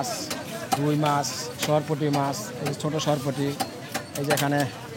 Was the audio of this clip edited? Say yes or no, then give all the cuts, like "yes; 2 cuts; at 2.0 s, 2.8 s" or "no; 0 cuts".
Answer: no; 0 cuts